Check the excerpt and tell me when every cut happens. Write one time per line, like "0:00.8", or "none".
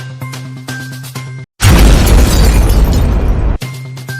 0:01.3